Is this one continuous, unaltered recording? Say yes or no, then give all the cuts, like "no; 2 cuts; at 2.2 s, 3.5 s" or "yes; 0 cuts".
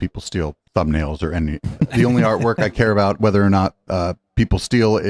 yes; 0 cuts